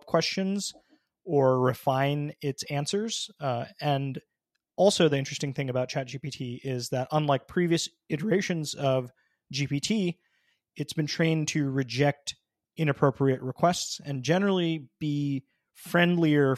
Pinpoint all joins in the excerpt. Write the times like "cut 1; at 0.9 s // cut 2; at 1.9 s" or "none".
none